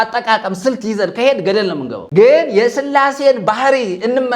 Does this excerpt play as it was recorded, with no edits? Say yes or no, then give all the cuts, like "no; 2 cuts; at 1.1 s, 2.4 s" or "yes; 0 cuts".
no; 1 cut; at 1.9 s